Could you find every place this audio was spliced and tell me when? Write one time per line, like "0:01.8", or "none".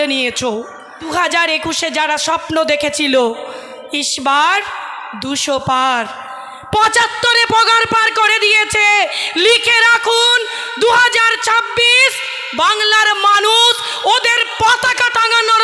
0:01.0

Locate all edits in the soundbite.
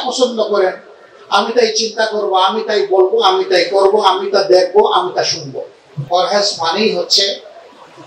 0:05.9

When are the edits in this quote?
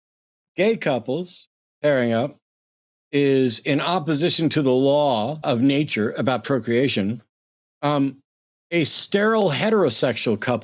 0:05.4

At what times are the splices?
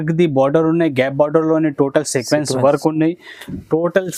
none

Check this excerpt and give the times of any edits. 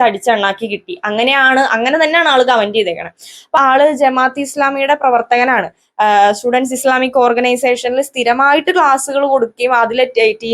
0:03.6

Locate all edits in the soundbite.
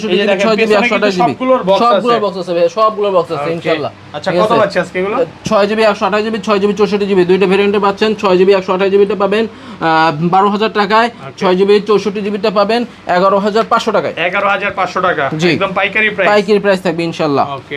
none

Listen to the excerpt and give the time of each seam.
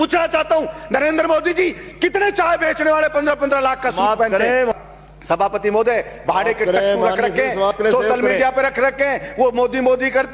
0:04.7

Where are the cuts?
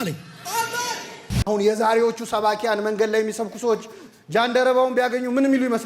0:01.3

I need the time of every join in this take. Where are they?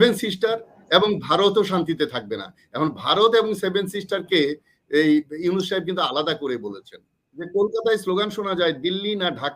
0:07.5

